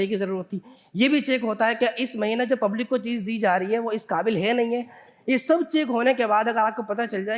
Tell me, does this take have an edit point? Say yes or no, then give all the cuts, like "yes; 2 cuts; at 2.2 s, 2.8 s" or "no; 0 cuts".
no; 0 cuts